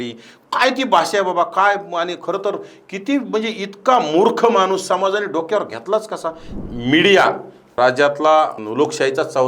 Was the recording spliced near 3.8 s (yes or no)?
no